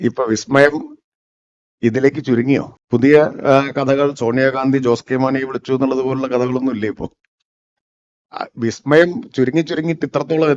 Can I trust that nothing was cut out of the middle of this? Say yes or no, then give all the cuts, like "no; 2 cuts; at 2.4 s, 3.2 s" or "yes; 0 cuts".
no; 1 cut; at 2.8 s